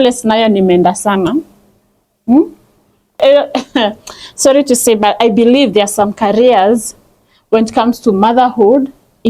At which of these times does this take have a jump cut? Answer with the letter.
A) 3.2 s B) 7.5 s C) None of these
A